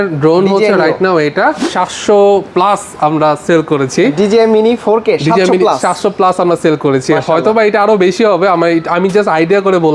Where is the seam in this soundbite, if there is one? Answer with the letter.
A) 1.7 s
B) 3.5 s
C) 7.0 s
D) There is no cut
A